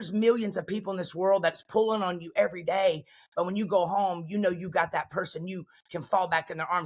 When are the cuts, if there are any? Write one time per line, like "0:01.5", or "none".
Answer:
none